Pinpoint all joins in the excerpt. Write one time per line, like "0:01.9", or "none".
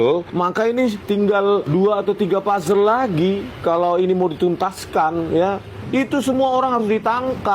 0:05.7